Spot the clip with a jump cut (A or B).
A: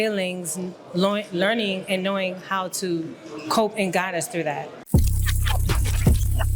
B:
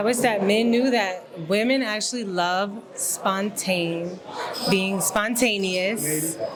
A